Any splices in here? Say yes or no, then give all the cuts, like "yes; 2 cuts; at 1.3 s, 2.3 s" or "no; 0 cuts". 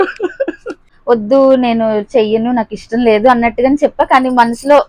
yes; 1 cut; at 0.9 s